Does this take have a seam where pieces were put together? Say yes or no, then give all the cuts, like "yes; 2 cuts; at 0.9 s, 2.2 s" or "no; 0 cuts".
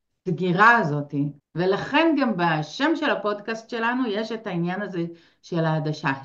yes; 1 cut; at 1.4 s